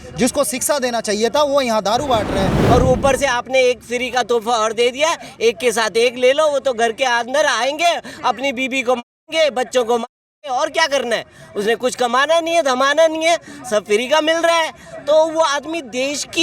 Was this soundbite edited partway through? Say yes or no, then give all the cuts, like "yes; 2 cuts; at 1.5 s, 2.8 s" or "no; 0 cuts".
yes; 1 cut; at 2.6 s